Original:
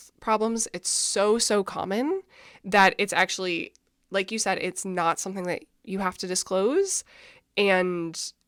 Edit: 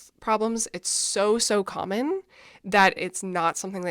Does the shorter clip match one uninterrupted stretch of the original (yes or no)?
no